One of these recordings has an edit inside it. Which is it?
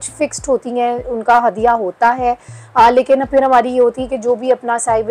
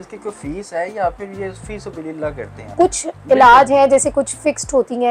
second; 1 cut; at 2.7 s

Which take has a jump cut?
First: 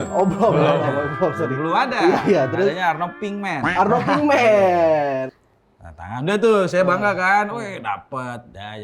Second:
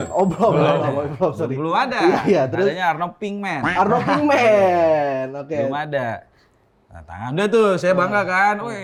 first; 1 cut; at 5.4 s

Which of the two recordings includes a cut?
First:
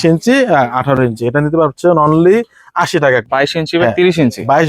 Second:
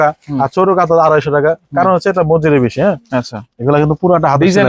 first; 1 cut; at 3.2 s

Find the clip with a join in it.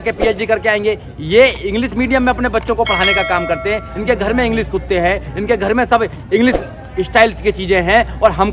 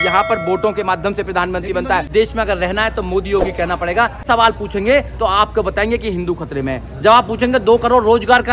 second; 2 cuts; at 2.1 s, 4.2 s

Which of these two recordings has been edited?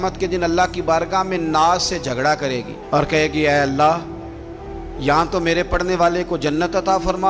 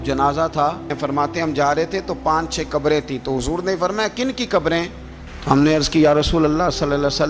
second; 1 cut; at 0.9 s

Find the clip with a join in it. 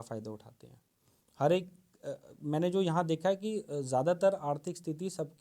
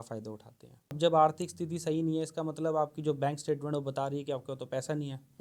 second; 1 cut; at 1.0 s

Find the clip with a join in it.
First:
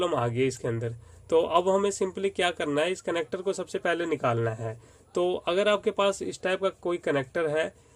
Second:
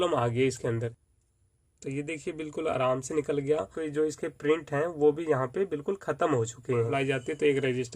second; 3 cuts; at 1.1 s, 3.8 s, 6.9 s

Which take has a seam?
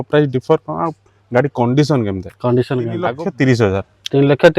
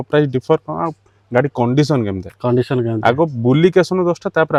first; 1 cut; at 3.1 s

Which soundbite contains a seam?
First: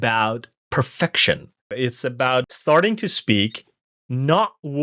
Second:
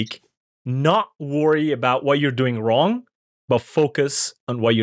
first; 2 cuts; at 1.6 s, 2.5 s

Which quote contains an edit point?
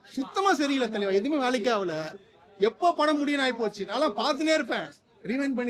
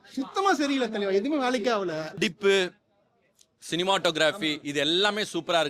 second; 1 cut; at 2.2 s

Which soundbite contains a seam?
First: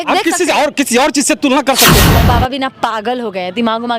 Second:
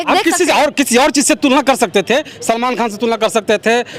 first; 1 cut; at 2.0 s

